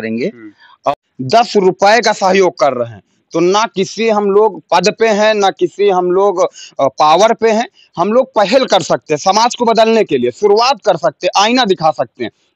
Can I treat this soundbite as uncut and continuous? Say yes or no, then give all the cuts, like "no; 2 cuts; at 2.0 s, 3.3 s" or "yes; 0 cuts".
no; 1 cut; at 0.9 s